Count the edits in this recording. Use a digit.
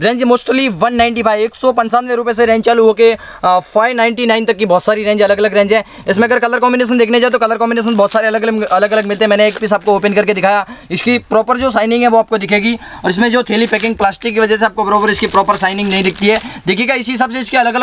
0